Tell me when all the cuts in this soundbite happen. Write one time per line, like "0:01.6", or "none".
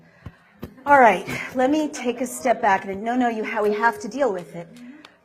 0:03.5